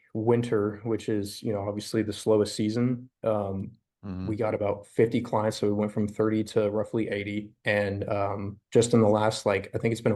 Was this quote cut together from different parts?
no; 0 cuts

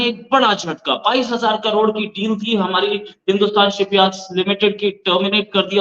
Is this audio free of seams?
yes; 0 cuts

